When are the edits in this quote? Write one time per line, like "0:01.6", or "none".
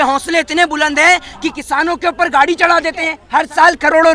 0:03.2

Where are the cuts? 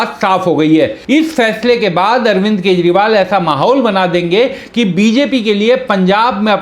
0:01.0

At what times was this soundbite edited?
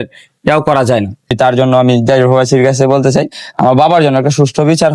0:01.3

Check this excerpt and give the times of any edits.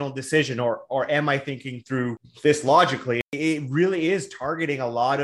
0:02.3
0:03.3

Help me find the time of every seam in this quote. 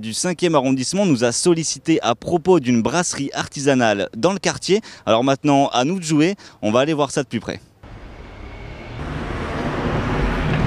0:06.4

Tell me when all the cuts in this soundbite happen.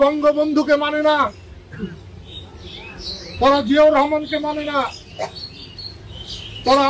none

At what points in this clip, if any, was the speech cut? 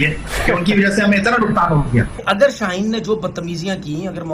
0:02.2

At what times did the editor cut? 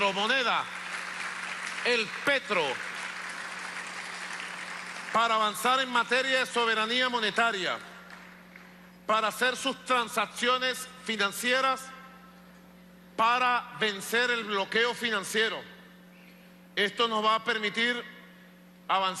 0:14.7

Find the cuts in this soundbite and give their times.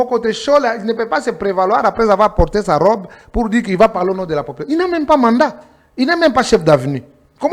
none

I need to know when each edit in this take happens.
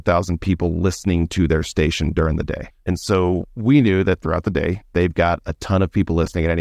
0:02.7
0:04.8

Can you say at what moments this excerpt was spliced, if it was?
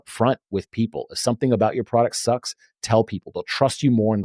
none

